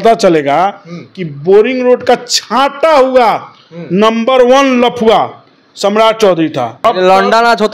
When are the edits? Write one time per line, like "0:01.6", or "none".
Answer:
0:06.7